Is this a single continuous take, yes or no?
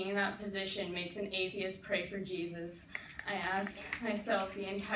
yes